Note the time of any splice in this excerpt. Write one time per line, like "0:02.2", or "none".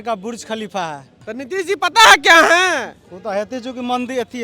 0:01.2